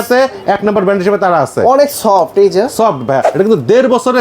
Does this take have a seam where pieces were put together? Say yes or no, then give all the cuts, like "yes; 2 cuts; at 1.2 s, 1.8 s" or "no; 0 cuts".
yes; 1 cut; at 3.3 s